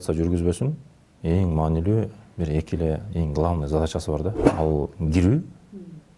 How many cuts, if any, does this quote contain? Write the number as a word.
one